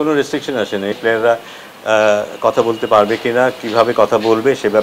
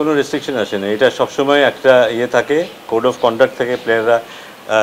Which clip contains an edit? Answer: first; 1 cut; at 1.0 s

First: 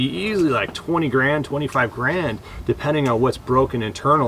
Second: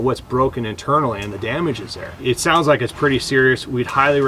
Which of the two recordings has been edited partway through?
second; 1 cut; at 2.1 s

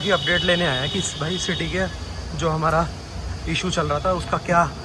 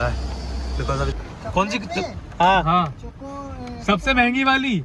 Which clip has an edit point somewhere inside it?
second; 1 cut; at 1.1 s

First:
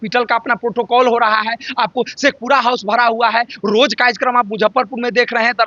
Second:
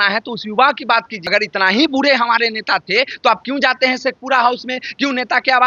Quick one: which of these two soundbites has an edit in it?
second; 1 cut; at 1.2 s

